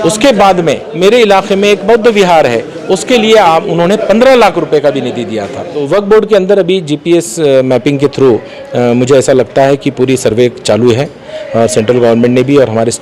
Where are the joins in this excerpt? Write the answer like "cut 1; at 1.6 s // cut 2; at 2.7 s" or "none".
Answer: cut 1; at 0.9 s // cut 2; at 5.8 s